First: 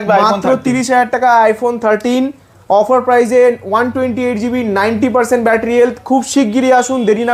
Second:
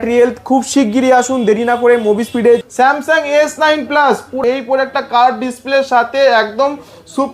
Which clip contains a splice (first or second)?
second